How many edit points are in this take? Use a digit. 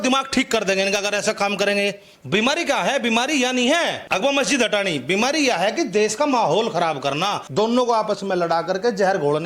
3